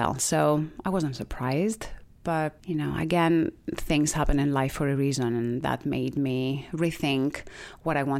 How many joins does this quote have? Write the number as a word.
zero